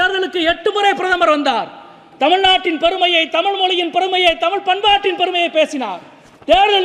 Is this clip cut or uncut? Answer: uncut